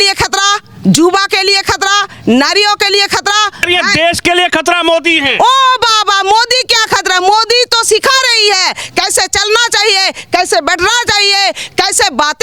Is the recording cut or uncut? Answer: cut